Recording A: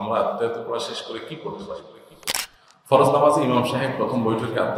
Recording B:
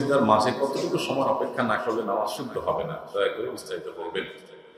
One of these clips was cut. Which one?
A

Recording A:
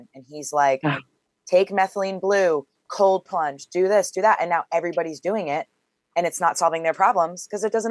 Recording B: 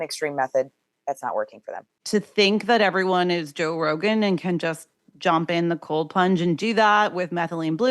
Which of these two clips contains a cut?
B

